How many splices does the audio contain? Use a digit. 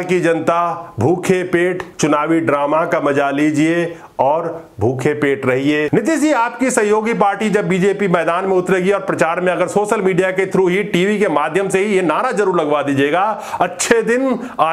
1